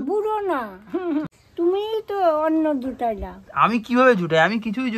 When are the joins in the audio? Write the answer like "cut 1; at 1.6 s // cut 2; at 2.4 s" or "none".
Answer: cut 1; at 1.3 s